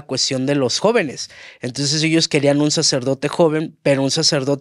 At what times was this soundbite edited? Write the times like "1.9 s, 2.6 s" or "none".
none